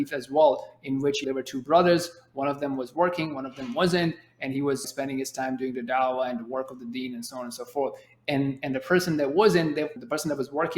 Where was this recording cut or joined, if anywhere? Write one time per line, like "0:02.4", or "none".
0:01.2
0:04.8
0:10.0